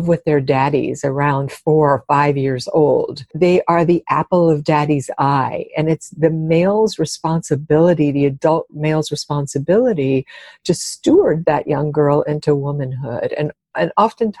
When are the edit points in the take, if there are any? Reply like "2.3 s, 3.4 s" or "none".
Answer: 3.3 s